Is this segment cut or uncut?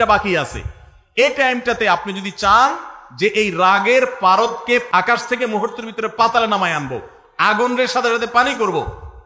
cut